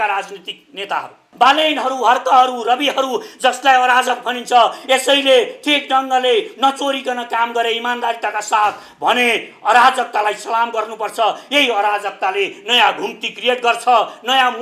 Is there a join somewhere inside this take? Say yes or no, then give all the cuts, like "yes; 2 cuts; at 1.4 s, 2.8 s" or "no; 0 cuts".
yes; 1 cut; at 1.3 s